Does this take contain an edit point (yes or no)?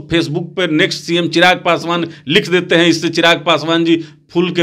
no